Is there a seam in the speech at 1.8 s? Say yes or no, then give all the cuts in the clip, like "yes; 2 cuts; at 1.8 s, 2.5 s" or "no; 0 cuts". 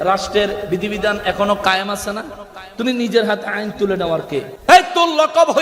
no; 1 cut; at 4.5 s